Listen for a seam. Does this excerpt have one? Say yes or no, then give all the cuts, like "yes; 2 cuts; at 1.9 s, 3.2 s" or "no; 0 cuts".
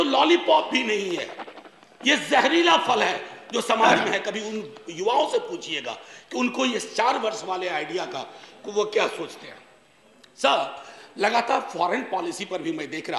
no; 0 cuts